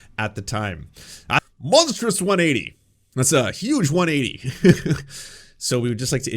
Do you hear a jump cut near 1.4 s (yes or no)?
yes